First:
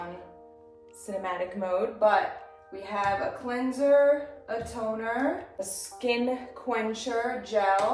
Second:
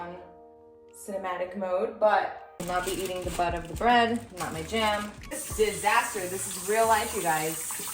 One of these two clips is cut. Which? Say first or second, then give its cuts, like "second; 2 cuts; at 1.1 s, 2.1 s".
second; 2 cuts; at 2.5 s, 5.4 s